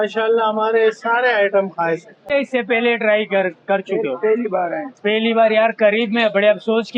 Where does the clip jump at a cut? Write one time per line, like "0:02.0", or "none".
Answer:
0:02.3